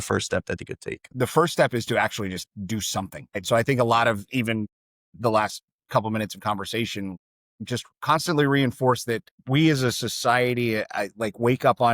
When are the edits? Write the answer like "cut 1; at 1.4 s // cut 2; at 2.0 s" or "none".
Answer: cut 1; at 1.1 s